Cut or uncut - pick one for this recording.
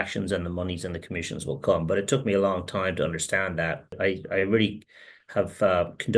cut